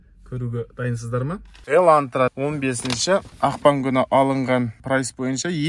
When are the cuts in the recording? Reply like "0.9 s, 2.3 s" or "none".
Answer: 1.5 s, 2.3 s, 3.3 s, 4.8 s